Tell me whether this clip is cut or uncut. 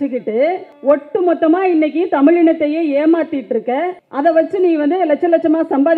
uncut